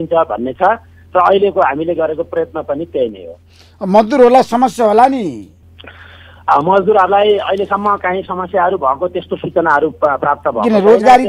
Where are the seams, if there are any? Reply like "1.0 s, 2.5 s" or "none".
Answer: none